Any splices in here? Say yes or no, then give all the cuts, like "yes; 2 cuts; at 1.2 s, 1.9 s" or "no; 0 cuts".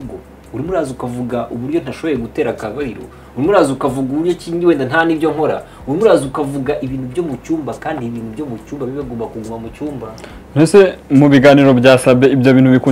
no; 0 cuts